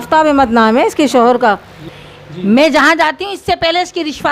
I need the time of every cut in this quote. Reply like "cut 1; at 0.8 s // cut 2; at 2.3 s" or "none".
cut 1; at 1.8 s